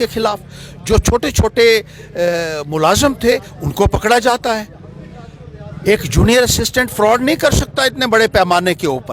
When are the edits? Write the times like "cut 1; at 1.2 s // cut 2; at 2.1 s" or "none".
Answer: none